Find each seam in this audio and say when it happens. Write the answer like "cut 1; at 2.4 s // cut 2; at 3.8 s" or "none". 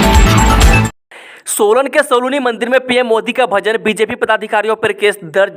cut 1; at 1.0 s